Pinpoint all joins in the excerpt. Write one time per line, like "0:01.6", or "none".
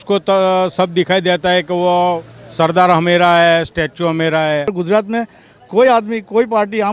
0:04.7